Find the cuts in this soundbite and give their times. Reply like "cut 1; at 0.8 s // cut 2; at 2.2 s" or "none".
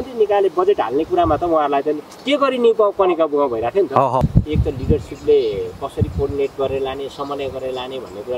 cut 1; at 4.2 s